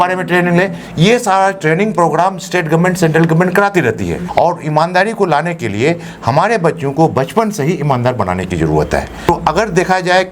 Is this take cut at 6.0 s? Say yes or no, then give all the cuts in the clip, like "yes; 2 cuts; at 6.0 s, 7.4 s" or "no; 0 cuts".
no; 2 cuts; at 4.2 s, 9.2 s